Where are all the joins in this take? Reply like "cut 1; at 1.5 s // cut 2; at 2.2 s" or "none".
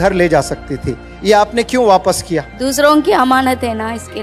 cut 1; at 2.5 s